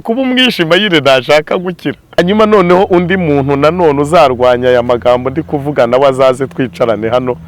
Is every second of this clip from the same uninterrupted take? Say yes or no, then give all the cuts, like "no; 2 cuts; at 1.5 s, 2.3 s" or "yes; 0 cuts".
no; 1 cut; at 2.2 s